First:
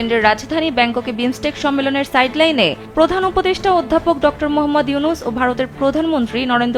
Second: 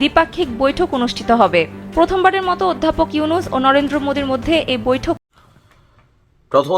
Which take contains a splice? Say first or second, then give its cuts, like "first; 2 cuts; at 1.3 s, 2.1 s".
second; 1 cut; at 5.2 s